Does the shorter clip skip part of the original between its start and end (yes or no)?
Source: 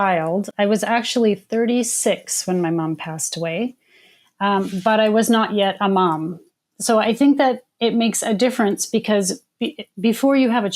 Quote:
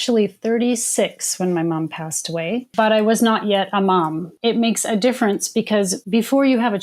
yes